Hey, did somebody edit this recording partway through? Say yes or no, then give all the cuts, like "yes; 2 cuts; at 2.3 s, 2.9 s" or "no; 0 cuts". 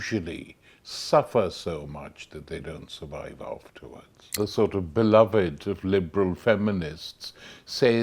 yes; 1 cut; at 4.2 s